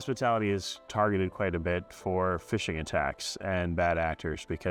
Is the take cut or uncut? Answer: uncut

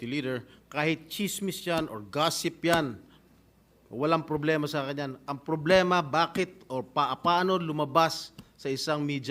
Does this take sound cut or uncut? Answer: uncut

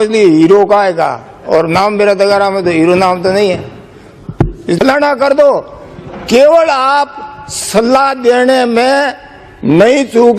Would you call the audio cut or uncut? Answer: cut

